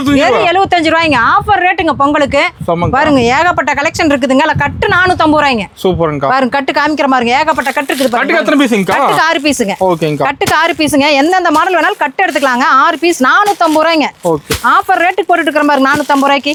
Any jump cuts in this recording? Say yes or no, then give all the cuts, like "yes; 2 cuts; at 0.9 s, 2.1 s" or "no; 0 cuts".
no; 0 cuts